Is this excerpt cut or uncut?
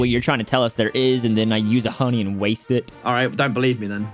cut